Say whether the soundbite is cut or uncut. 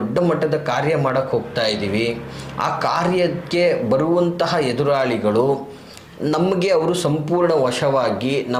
uncut